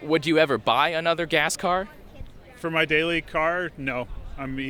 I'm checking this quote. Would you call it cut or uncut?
uncut